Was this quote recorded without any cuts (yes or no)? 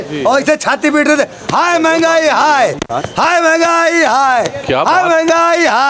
yes